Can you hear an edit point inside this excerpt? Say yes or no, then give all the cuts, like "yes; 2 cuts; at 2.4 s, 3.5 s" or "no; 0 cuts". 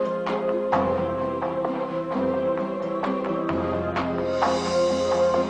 no; 0 cuts